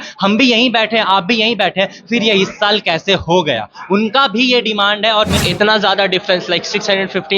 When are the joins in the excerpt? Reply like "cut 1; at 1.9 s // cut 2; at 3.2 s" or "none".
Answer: cut 1; at 5.3 s